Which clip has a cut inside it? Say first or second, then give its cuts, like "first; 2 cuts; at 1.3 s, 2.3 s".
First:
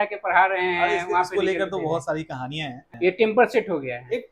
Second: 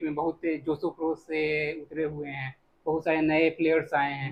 first; 1 cut; at 2.8 s